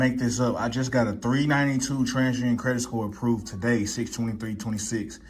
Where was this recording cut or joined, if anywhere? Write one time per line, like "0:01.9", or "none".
none